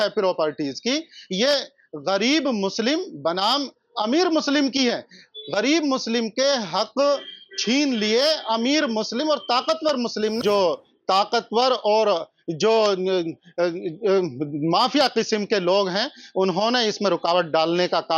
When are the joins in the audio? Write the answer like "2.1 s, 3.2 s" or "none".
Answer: 10.4 s